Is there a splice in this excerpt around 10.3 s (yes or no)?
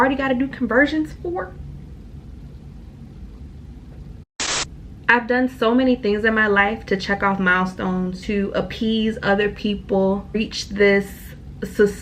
yes